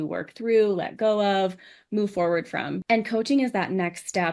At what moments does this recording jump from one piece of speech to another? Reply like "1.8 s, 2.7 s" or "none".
2.8 s